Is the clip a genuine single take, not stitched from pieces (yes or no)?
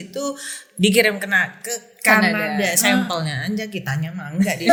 yes